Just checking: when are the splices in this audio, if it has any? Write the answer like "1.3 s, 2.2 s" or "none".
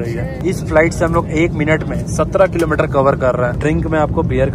3.6 s